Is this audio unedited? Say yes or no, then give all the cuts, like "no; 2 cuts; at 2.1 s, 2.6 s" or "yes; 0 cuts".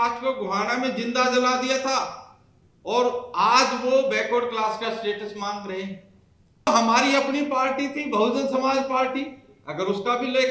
no; 1 cut; at 6.7 s